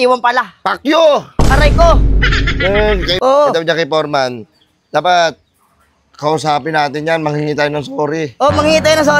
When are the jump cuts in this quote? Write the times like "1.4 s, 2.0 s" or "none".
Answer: 3.1 s